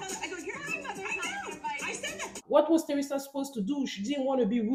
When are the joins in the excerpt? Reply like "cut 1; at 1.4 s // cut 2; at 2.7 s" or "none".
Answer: none